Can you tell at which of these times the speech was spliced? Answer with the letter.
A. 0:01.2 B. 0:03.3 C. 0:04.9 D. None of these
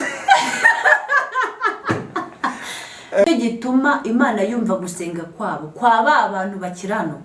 B